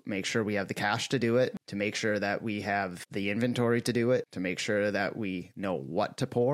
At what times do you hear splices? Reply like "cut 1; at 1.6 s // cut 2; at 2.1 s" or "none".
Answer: cut 1; at 1.6 s // cut 2; at 3.0 s // cut 3; at 4.3 s

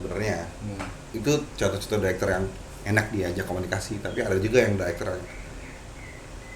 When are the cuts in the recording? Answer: cut 1; at 1.0 s

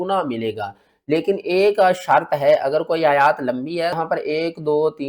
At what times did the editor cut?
cut 1; at 4.0 s

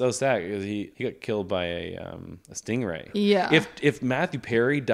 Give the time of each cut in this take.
cut 1; at 0.9 s // cut 2; at 3.0 s

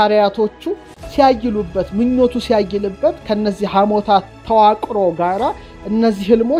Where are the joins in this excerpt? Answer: none

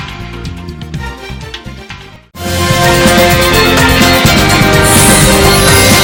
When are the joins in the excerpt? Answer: none

